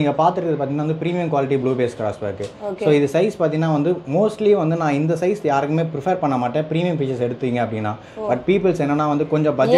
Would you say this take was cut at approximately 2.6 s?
no; 0 cuts

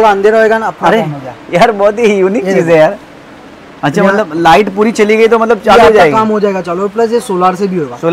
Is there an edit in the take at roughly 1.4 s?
no; 0 cuts

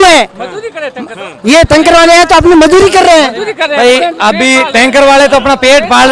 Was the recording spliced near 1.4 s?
no; 0 cuts

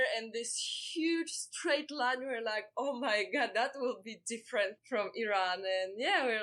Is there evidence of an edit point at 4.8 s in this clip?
yes; 1 cut; at 4.8 s

